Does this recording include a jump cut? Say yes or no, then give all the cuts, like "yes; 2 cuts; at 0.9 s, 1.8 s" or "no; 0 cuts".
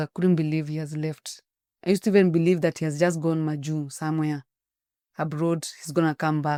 no; 0 cuts